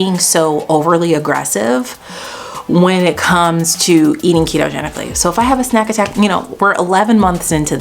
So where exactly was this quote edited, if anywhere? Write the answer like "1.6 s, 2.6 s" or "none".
none